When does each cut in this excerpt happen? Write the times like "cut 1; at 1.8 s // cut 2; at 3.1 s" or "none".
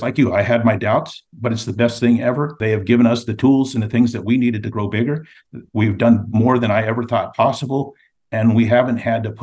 cut 1; at 2.6 s